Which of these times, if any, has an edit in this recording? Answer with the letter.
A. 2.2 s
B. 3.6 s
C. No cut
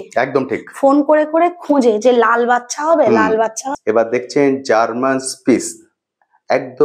B